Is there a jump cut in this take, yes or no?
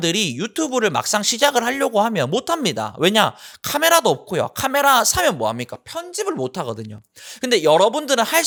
no